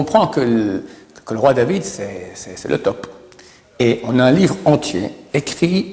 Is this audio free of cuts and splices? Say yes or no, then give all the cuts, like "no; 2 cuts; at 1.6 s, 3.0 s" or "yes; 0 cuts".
yes; 0 cuts